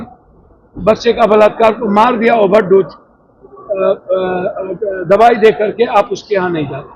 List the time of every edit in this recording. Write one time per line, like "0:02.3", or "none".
none

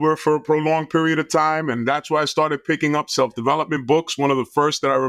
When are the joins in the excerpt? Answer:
none

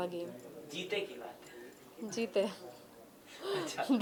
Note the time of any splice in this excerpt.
none

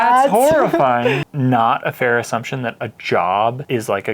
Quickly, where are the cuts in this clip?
0:01.3

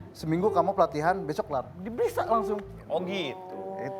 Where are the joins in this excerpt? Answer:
0:02.8

